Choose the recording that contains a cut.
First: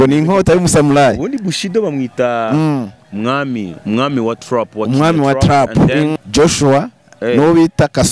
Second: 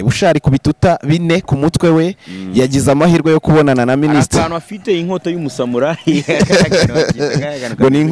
first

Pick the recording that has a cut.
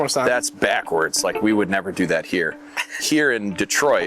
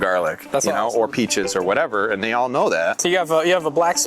second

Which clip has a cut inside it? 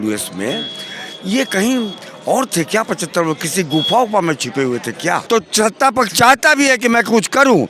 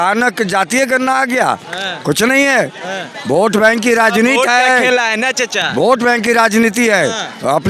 first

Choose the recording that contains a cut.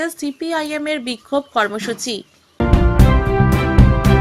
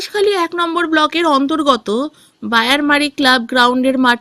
first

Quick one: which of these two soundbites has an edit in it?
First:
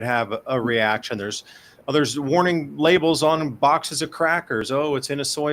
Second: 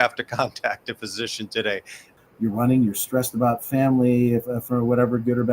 second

